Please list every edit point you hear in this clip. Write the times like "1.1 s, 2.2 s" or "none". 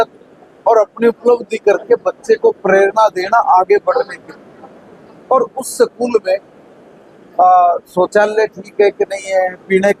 none